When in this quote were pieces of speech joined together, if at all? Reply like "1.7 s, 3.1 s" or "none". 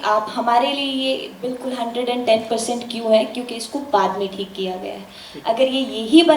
none